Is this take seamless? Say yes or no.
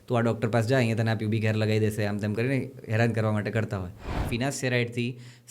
no